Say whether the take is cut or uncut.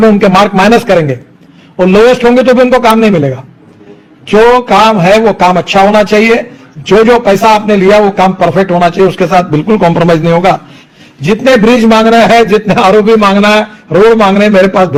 uncut